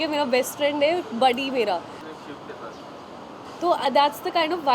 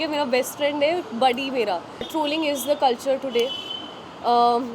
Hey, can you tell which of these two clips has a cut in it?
second; 1 cut; at 2.1 s

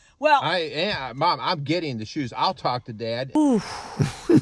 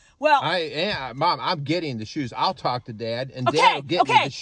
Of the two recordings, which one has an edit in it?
second; 1 cut; at 3.3 s

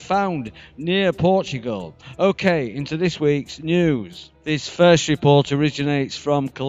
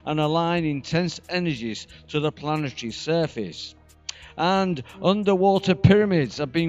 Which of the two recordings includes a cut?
first; 1 cut; at 2.8 s

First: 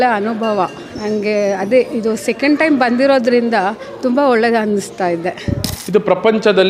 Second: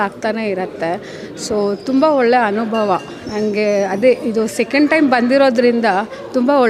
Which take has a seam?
first; 1 cut; at 5.7 s

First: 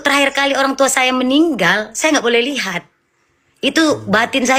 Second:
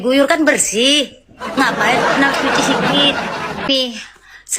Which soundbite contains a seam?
second; 1 cut; at 3.7 s

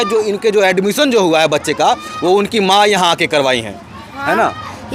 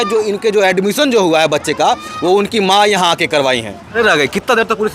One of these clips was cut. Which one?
second; 1 cut; at 4.0 s

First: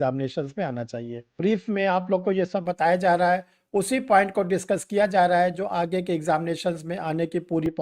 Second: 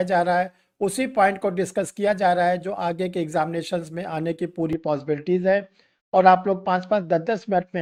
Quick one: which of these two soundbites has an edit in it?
first; 1 cut; at 1.4 s

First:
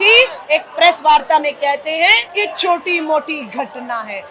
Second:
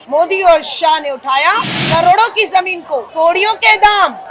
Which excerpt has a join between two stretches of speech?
second; 1 cut; at 1.8 s

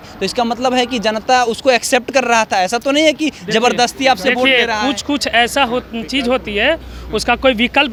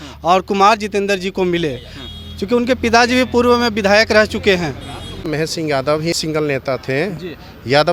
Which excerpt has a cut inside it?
second; 2 cuts; at 5.2 s, 6.2 s

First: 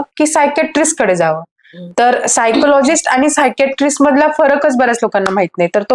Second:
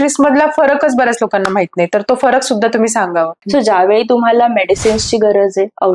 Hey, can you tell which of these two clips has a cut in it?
second; 1 cut; at 3.4 s

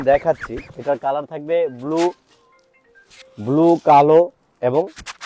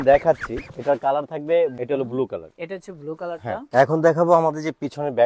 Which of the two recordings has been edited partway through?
second; 2 cuts; at 1.8 s, 3.6 s

